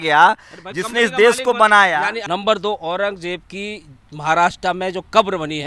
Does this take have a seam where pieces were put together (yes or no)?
yes